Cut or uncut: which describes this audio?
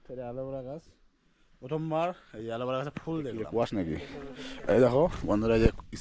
cut